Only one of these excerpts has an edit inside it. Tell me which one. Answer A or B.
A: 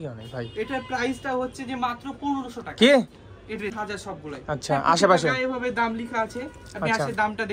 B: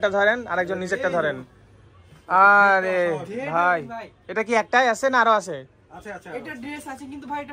A